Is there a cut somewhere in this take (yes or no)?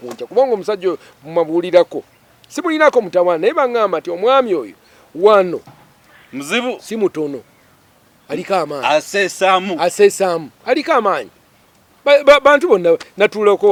no